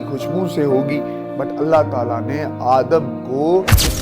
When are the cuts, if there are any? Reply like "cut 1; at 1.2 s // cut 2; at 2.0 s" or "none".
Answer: cut 1; at 1.2 s